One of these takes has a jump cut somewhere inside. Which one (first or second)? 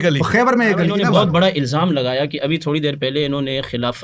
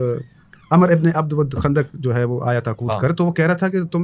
first